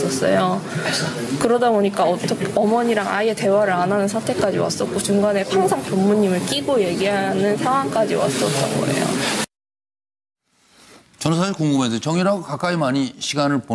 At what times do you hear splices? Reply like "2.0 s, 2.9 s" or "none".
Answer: 4.6 s